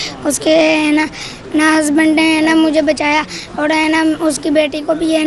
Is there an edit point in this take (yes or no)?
no